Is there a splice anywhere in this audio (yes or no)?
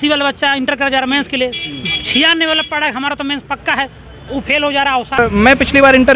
yes